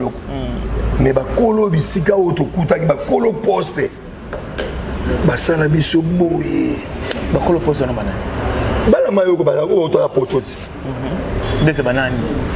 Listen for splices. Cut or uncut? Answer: uncut